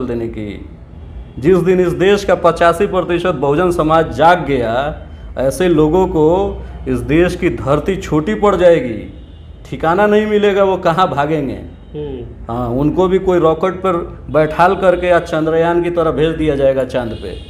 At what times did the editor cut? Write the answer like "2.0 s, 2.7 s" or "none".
none